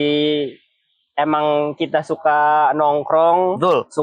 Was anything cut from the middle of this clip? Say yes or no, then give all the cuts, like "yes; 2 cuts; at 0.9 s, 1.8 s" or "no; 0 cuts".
no; 0 cuts